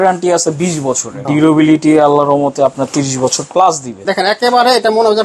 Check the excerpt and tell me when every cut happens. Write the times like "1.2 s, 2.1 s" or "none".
1.2 s, 4.0 s